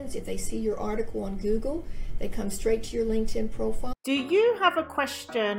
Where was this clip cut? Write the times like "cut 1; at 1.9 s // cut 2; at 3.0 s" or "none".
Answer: cut 1; at 4.0 s